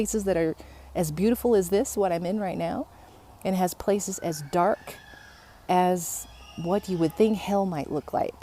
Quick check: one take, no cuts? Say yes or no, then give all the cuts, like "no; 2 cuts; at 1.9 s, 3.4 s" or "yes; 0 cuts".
yes; 0 cuts